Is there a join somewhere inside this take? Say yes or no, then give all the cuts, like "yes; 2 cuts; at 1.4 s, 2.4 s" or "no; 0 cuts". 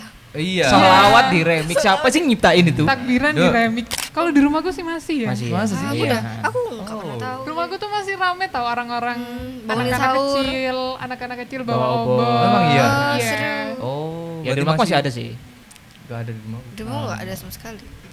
yes; 1 cut; at 3.9 s